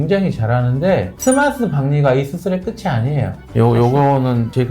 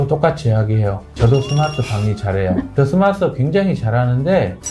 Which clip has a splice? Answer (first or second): first